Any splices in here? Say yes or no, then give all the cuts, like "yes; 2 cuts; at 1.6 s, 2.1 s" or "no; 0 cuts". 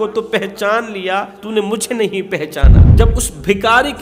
yes; 2 cuts; at 1.4 s, 2.9 s